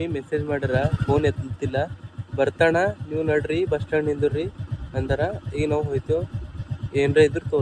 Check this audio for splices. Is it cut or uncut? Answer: uncut